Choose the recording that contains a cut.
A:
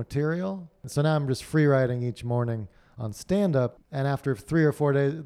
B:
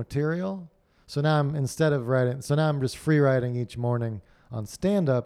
A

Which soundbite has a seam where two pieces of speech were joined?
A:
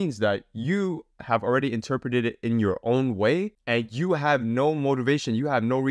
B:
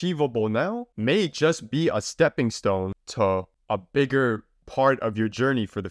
B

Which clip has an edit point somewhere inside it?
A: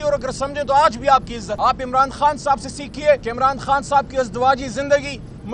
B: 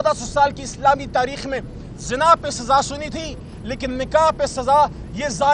A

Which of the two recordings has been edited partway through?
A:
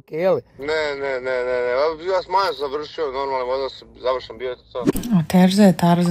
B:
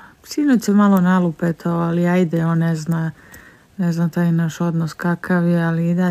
A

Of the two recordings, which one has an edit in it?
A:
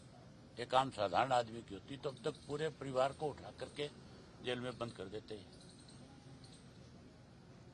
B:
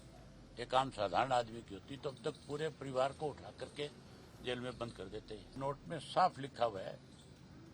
B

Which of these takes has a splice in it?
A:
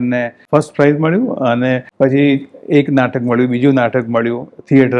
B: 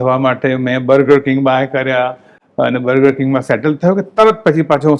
A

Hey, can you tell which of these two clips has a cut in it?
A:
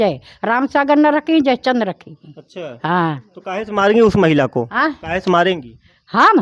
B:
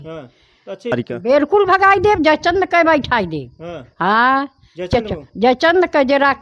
B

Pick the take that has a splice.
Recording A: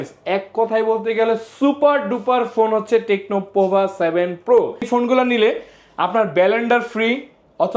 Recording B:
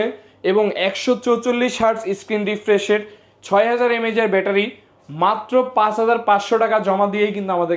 A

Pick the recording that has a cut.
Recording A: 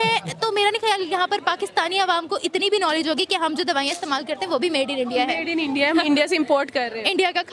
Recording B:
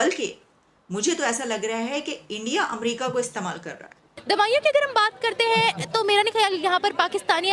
B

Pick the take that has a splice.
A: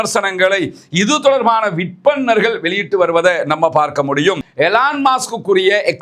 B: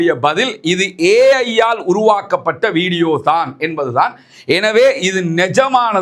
A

